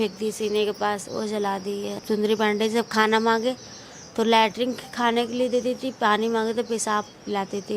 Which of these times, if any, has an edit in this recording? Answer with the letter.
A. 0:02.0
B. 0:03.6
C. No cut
A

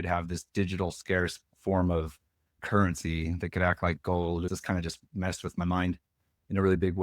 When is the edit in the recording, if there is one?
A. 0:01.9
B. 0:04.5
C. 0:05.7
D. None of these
B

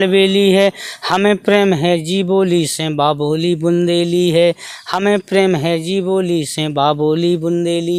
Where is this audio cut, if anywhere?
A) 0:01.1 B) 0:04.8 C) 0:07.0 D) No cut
D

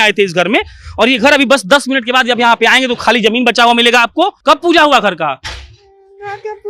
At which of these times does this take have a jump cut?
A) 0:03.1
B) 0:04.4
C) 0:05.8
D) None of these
B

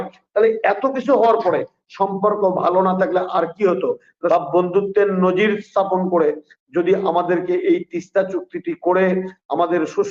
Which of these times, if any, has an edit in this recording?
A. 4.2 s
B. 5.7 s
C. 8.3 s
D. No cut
A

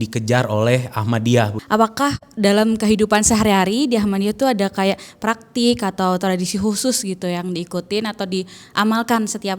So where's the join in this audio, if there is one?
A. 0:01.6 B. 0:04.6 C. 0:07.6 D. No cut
A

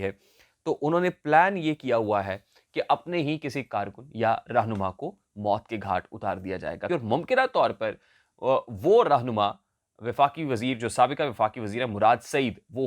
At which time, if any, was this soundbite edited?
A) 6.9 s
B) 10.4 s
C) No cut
A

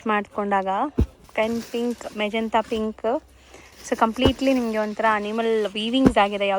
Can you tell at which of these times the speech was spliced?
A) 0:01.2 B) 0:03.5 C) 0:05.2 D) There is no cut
A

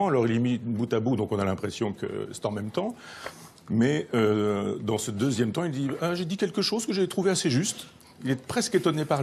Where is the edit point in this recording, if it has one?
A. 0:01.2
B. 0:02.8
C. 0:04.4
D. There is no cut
D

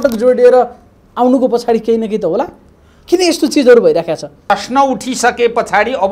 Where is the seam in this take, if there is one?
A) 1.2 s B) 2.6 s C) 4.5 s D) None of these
C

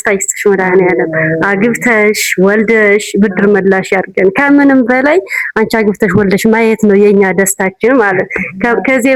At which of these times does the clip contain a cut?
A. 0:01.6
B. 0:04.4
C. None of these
C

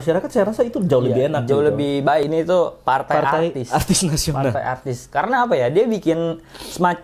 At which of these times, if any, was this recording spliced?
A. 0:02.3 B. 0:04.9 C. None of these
A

